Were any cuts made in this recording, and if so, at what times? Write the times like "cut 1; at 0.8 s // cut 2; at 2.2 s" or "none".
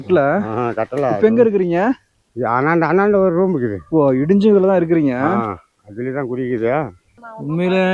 cut 1; at 7.0 s